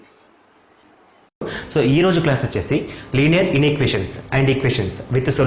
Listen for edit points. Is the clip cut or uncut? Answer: cut